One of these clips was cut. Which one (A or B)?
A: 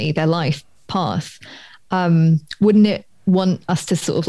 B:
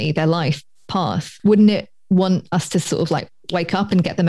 B